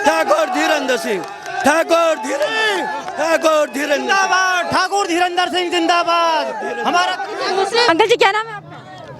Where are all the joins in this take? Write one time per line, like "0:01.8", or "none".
none